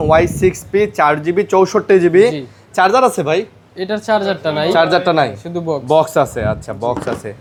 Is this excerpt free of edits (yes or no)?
yes